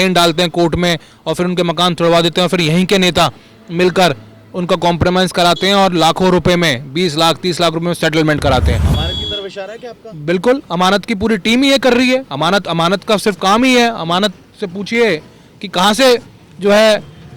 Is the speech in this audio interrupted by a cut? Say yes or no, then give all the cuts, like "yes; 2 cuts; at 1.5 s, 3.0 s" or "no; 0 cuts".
no; 0 cuts